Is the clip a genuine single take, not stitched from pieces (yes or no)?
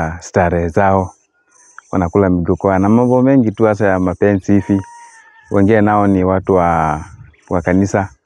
yes